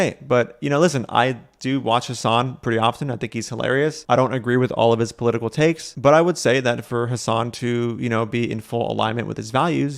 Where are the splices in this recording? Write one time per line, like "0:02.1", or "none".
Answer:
none